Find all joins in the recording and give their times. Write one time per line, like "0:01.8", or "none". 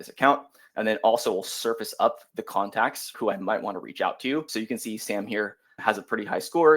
0:03.1
0:04.5
0:05.8